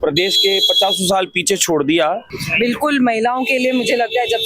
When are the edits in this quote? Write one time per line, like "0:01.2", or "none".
0:02.3